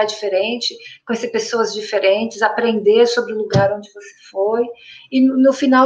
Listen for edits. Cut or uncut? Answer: uncut